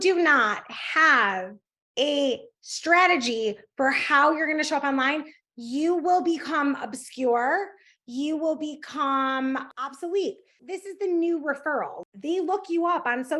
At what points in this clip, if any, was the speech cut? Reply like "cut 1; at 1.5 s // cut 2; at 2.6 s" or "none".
cut 1; at 9.7 s // cut 2; at 10.6 s // cut 3; at 12.0 s